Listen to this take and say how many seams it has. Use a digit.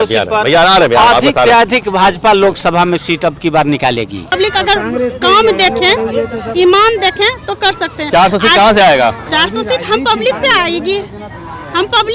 1